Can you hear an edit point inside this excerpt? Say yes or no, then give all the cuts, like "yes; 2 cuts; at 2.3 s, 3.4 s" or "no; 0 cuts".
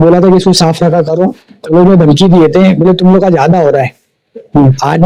no; 0 cuts